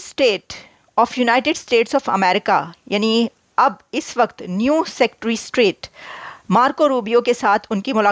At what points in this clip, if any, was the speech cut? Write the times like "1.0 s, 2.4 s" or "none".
none